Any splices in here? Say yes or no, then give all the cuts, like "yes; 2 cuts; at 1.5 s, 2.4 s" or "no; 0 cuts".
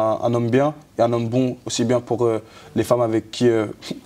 no; 0 cuts